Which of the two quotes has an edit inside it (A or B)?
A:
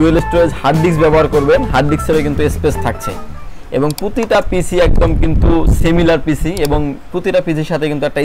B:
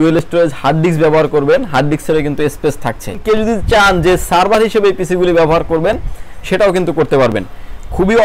B